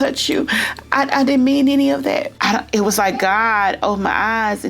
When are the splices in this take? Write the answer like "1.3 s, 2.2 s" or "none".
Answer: 2.3 s